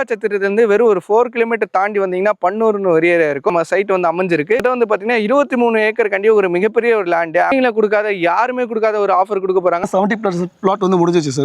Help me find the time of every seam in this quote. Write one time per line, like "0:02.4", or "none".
0:03.5
0:04.6
0:07.5
0:09.8